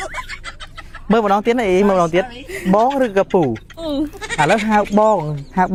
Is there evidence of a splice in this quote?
no; 0 cuts

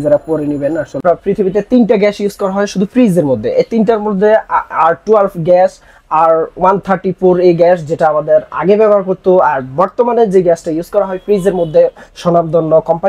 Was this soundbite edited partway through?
yes; 1 cut; at 0.9 s

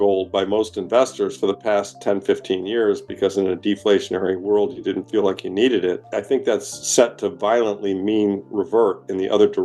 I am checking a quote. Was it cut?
yes; 1 cut; at 6.1 s

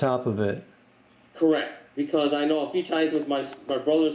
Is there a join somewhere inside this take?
yes; 1 cut; at 1.9 s

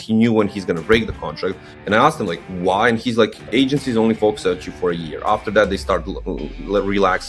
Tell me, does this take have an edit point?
yes; 1 cut; at 1.7 s

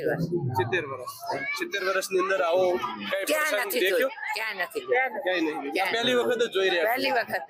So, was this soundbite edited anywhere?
no; 0 cuts

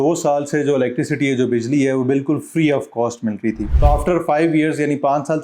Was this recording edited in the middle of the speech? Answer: yes; 1 cut; at 3.6 s

